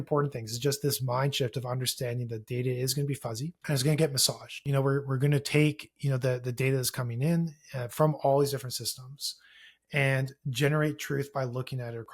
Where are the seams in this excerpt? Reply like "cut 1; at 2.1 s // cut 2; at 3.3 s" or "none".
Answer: cut 1; at 3.6 s // cut 2; at 4.6 s